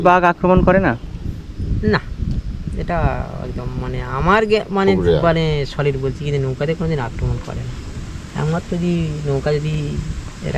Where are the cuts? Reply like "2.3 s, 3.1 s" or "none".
none